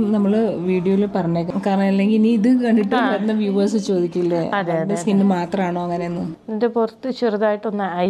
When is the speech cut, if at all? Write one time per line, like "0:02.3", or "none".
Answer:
0:01.5
0:06.4